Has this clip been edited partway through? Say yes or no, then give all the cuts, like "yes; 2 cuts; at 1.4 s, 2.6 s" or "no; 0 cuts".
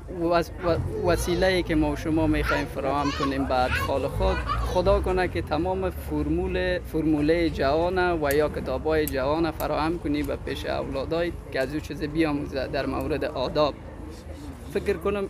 no; 0 cuts